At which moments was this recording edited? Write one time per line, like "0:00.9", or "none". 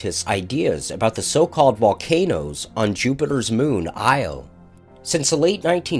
0:02.4